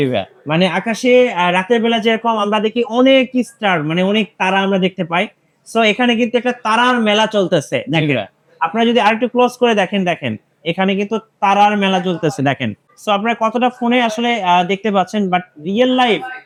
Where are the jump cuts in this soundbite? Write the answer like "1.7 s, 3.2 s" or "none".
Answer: none